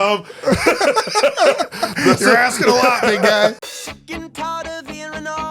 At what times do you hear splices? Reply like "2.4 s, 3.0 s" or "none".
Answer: 3.5 s